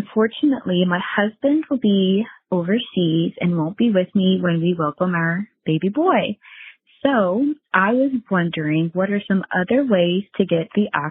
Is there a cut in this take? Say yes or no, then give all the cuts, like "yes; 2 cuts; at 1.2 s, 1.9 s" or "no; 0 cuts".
no; 0 cuts